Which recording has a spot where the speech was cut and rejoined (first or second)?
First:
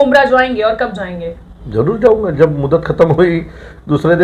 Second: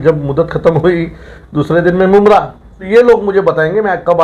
second